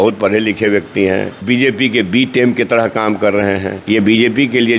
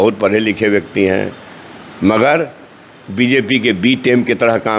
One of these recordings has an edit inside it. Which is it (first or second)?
first